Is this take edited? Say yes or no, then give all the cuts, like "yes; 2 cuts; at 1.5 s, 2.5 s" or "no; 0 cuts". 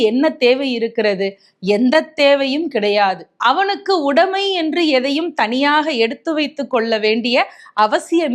no; 0 cuts